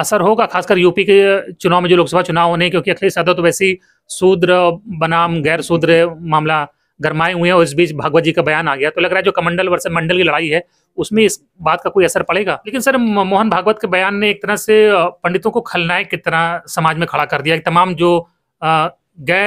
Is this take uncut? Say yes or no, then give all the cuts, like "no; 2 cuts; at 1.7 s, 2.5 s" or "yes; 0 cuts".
no; 1 cut; at 12.7 s